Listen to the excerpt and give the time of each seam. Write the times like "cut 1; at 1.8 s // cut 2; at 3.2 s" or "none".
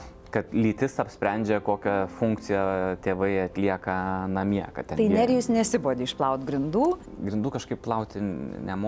cut 1; at 7.1 s